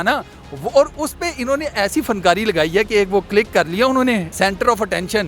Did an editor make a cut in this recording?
yes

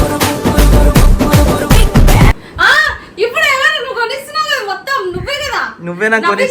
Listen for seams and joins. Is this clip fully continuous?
no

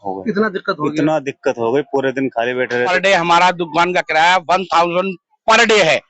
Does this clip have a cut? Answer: yes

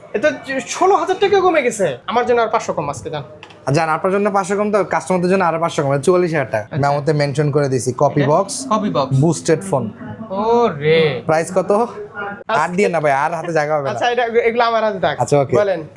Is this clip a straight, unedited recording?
no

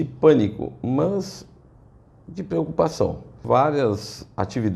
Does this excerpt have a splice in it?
yes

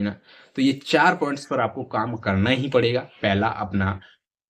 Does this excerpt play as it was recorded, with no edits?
yes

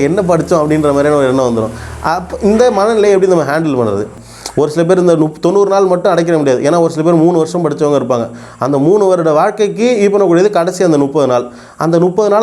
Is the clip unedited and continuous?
no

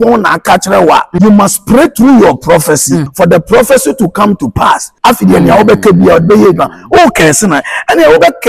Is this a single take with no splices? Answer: no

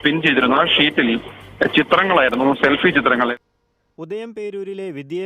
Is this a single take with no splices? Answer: no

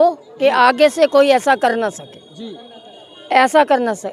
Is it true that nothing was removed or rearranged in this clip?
yes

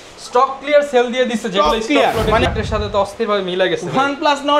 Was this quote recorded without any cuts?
no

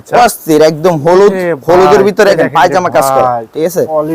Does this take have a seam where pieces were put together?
yes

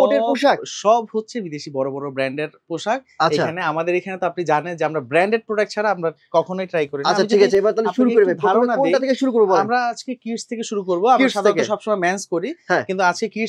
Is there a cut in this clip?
no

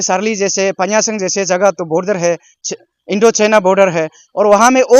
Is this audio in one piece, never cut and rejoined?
yes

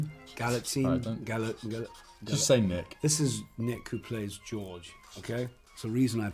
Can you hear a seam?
no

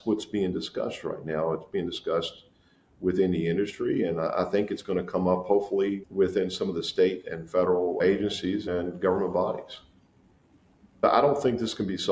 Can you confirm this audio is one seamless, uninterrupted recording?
no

